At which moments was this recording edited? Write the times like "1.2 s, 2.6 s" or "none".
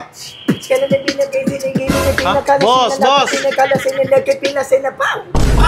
none